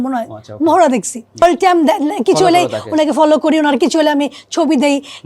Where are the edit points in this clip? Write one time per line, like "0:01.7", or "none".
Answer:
0:01.4